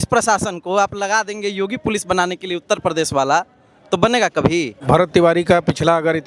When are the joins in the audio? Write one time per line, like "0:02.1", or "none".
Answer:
0:04.8